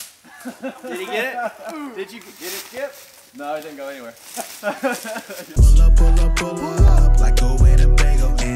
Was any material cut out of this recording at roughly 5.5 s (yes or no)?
yes